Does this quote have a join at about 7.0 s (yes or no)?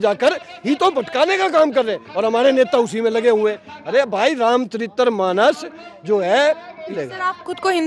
yes